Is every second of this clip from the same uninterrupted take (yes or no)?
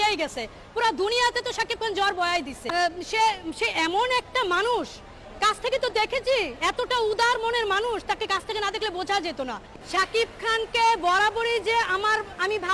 no